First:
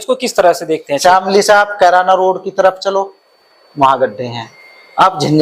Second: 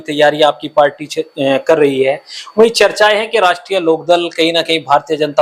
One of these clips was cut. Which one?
first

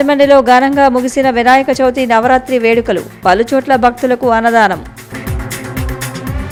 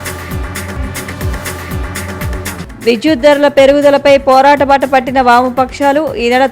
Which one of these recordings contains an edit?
second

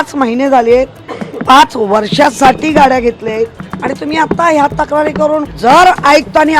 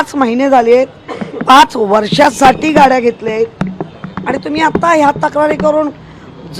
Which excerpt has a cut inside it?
first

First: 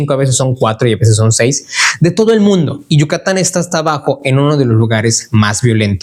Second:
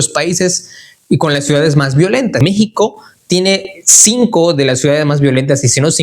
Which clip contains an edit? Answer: second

